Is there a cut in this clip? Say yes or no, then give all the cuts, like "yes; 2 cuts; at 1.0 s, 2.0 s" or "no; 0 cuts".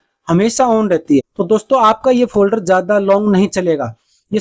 yes; 1 cut; at 1.3 s